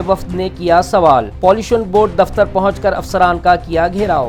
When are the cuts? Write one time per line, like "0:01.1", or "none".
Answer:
none